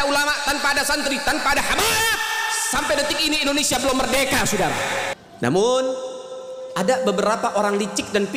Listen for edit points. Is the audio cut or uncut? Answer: cut